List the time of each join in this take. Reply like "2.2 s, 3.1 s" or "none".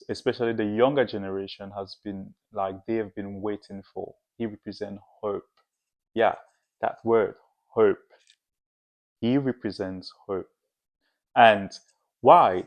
none